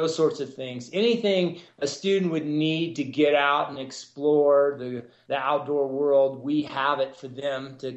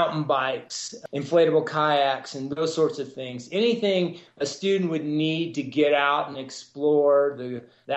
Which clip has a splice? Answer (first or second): second